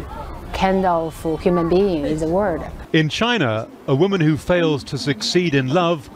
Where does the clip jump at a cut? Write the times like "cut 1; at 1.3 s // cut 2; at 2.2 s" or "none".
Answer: cut 1; at 2.7 s